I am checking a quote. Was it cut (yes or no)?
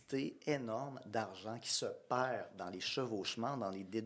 no